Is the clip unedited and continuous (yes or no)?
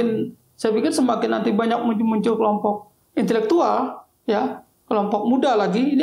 yes